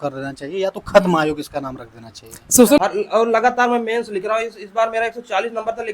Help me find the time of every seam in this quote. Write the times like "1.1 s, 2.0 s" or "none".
2.8 s